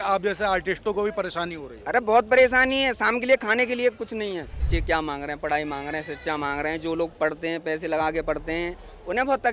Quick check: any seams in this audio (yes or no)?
yes